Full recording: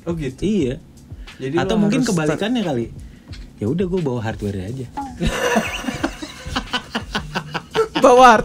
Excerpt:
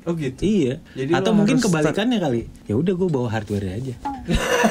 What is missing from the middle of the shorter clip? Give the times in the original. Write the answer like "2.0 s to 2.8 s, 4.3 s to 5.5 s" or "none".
0.9 s to 1.3 s, 3.0 s to 3.5 s

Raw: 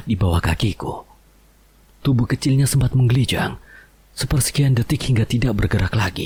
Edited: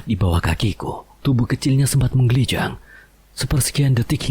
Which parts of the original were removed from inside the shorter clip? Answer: 1.1 s to 1.9 s

